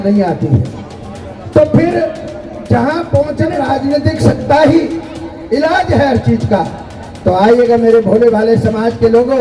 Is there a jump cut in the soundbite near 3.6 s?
yes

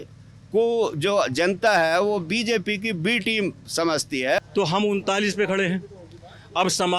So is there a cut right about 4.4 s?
yes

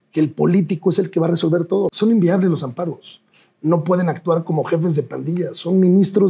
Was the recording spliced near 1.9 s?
yes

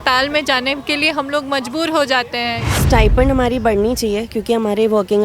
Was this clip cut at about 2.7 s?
yes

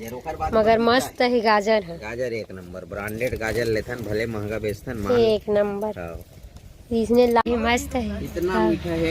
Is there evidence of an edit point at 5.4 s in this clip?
no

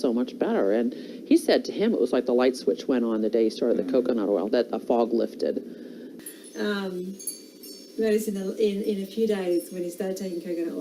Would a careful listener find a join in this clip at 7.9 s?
no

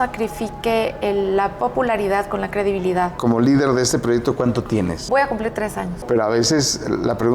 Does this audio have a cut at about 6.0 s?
yes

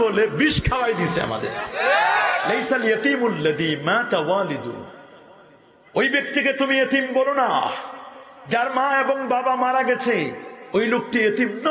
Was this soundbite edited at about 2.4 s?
yes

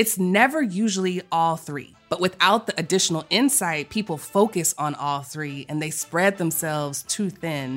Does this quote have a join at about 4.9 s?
no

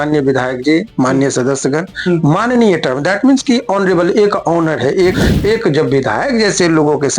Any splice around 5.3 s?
yes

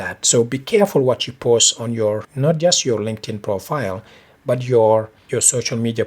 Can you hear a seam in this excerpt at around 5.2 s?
yes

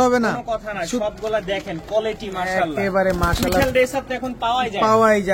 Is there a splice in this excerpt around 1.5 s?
no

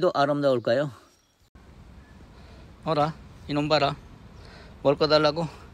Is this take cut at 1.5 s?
yes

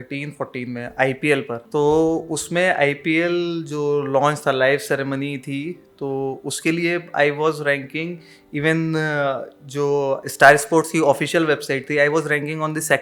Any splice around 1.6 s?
yes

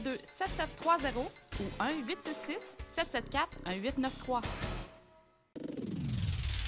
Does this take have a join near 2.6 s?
no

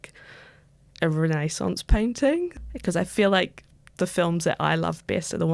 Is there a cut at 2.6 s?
yes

